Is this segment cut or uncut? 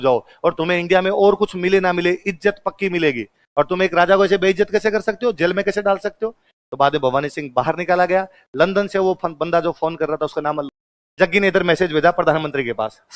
cut